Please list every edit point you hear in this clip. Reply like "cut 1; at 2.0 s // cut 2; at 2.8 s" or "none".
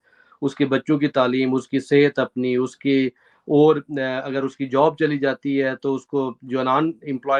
none